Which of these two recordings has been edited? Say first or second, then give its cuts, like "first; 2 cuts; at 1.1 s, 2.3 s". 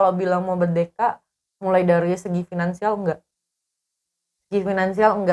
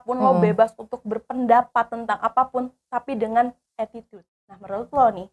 second; 1 cut; at 4.2 s